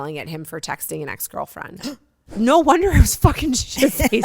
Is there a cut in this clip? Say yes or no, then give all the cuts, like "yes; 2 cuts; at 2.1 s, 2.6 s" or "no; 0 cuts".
yes; 1 cut; at 2.3 s